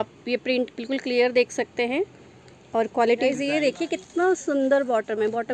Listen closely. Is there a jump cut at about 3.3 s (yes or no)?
yes